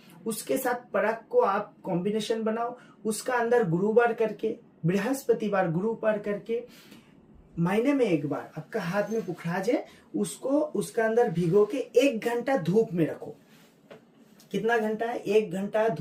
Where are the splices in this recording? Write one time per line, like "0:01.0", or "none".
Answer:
none